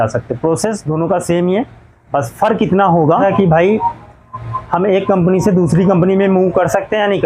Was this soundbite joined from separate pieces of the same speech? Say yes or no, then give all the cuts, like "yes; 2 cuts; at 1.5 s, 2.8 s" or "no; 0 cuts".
yes; 1 cut; at 3.2 s